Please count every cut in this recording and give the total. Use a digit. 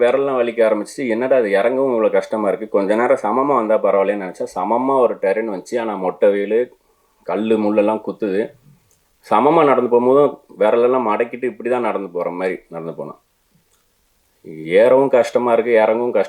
0